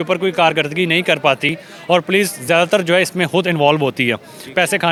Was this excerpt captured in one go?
yes; 0 cuts

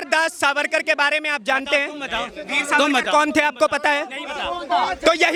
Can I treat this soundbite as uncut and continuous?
yes; 0 cuts

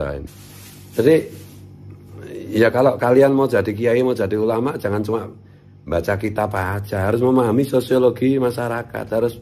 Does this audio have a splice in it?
no; 0 cuts

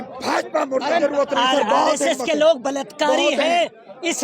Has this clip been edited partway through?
yes; 1 cut; at 1.0 s

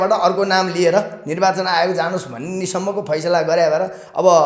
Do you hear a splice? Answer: no; 0 cuts

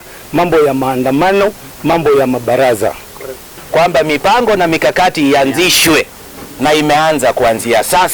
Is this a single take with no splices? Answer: no; 1 cut; at 3.6 s

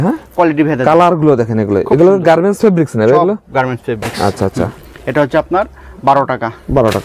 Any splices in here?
no; 0 cuts

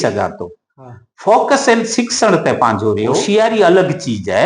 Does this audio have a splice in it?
yes; 1 cut; at 3.2 s

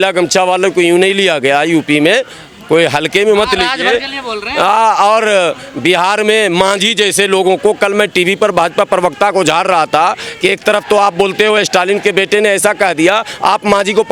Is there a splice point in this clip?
no; 0 cuts

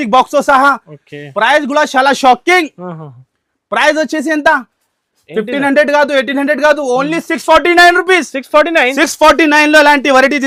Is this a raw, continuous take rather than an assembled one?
yes; 0 cuts

